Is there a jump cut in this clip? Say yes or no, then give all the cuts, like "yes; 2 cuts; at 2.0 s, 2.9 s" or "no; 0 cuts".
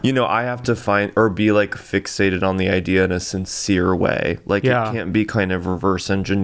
no; 0 cuts